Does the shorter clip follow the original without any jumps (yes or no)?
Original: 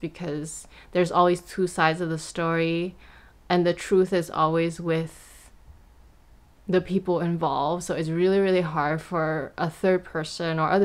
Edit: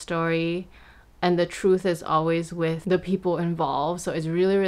no